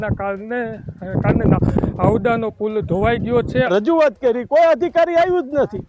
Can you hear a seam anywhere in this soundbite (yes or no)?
yes